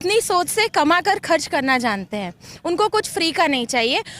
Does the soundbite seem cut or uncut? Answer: uncut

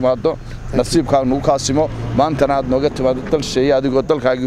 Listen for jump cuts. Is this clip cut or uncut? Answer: uncut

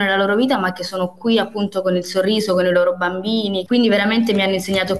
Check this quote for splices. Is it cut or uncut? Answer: cut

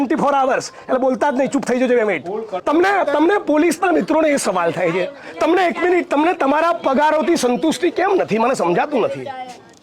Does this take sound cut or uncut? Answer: cut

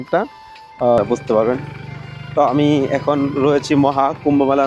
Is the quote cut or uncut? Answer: cut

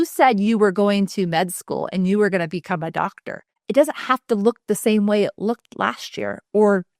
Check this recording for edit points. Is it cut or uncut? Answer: cut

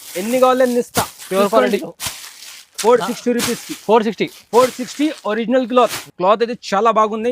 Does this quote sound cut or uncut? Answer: cut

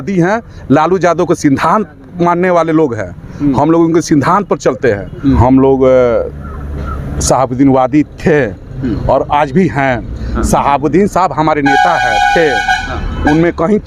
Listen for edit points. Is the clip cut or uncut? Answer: cut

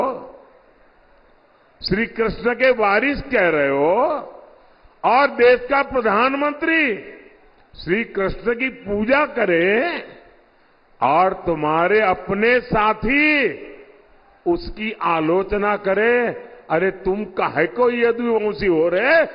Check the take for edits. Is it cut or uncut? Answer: uncut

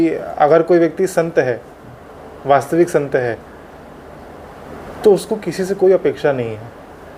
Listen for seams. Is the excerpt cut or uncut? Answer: uncut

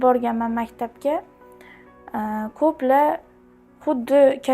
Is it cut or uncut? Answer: uncut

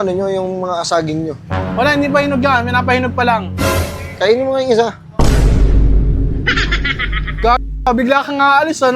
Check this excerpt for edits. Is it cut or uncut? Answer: uncut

